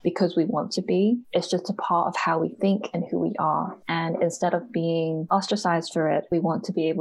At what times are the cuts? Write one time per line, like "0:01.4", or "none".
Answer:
0:01.2
0:03.8
0:05.2
0:06.3